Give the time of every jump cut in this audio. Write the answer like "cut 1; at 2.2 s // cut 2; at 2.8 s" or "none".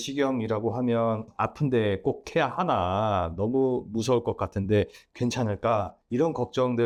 none

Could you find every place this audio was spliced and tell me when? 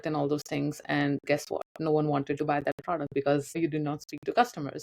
cut 1; at 3.6 s

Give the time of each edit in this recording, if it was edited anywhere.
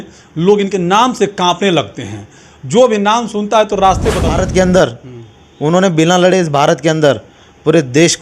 cut 1; at 4.3 s

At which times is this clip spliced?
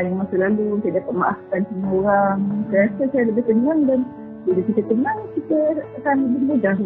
none

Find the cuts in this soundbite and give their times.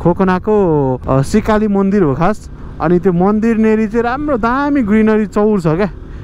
cut 1; at 1.0 s

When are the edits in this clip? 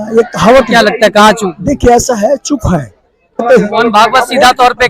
cut 1; at 3.4 s

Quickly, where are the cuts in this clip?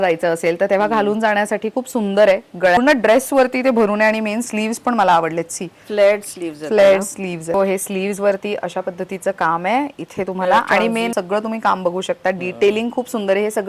cut 1; at 2.8 s // cut 2; at 7.5 s // cut 3; at 11.1 s

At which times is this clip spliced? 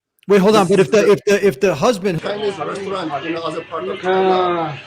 cut 1; at 2.2 s

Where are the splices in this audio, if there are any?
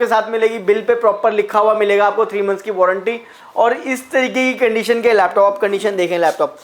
none

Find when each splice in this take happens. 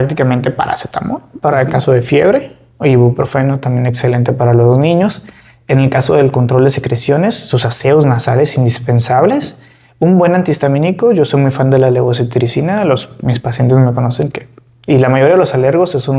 none

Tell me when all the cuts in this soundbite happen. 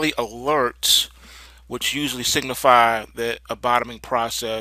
none

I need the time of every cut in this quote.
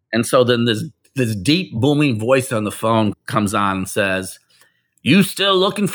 none

